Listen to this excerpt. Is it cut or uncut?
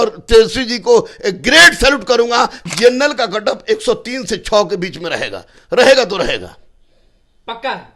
cut